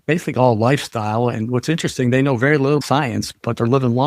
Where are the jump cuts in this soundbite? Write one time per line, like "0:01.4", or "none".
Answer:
0:02.8